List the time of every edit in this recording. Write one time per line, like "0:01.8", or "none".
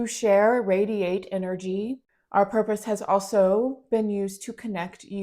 0:02.1